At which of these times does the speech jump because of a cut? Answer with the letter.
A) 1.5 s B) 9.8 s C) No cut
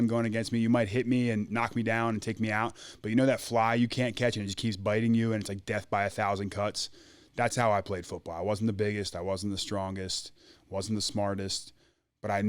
A